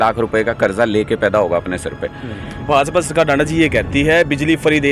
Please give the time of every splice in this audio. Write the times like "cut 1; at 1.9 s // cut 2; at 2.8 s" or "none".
cut 1; at 2.5 s